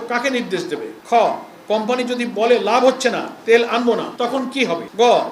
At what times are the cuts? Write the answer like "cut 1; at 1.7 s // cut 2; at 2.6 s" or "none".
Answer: cut 1; at 0.9 s // cut 2; at 4.1 s

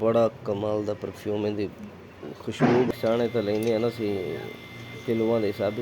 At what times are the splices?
cut 1; at 2.9 s

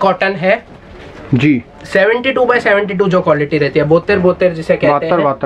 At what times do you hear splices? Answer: none

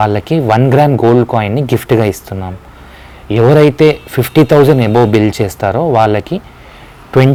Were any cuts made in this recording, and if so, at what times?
none

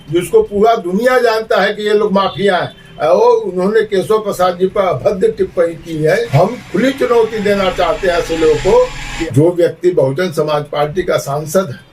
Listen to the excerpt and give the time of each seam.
cut 1; at 6.3 s // cut 2; at 9.1 s

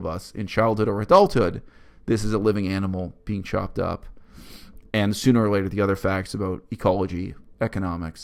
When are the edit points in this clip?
none

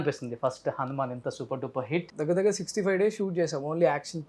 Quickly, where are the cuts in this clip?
cut 1; at 2.1 s

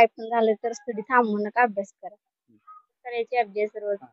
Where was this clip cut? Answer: cut 1; at 2.9 s

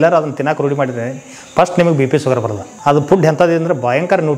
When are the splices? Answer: cut 1; at 2.6 s

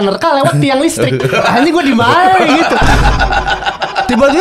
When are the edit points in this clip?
none

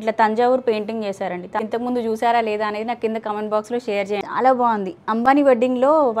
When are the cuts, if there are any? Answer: cut 1; at 1.6 s // cut 2; at 4.2 s

